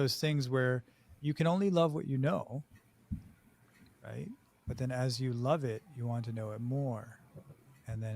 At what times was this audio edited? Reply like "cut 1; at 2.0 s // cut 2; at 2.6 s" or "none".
cut 1; at 1.1 s